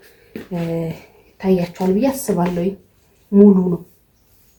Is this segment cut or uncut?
uncut